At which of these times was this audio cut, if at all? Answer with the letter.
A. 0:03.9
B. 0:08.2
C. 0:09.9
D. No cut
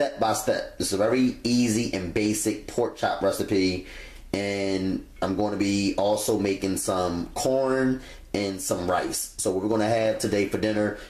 C